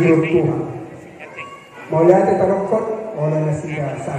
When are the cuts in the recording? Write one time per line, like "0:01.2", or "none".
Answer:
none